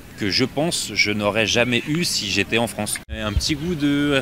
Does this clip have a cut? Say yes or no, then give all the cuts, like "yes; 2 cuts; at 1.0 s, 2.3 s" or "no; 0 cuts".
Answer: yes; 1 cut; at 3.3 s